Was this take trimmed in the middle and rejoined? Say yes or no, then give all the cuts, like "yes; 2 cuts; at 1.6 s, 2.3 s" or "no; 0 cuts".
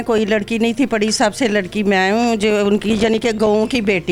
no; 0 cuts